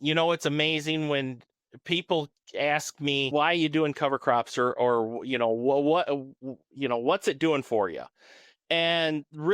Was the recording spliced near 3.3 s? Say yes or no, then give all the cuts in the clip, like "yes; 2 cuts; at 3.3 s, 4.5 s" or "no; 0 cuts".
yes; 1 cut; at 3.3 s